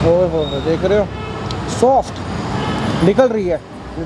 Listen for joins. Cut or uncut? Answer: uncut